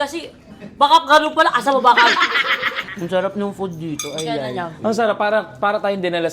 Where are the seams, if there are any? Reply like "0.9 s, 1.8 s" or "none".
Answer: 2.8 s

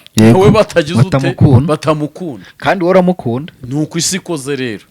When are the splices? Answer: none

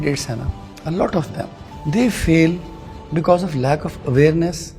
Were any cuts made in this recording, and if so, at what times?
1.7 s

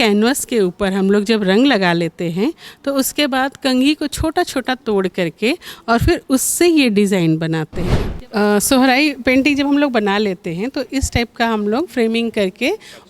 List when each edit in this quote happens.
8.0 s

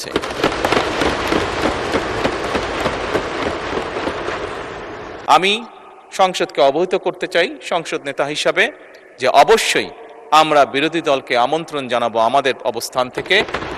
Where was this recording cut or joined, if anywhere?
5.1 s

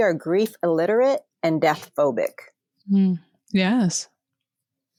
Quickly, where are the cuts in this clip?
none

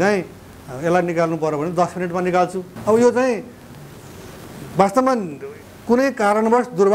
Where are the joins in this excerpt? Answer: 2.7 s

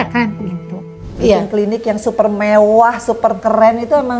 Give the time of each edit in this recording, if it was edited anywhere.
1.1 s

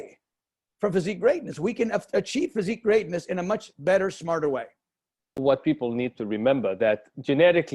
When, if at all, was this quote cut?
5.4 s

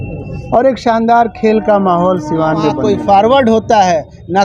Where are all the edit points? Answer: 2.8 s

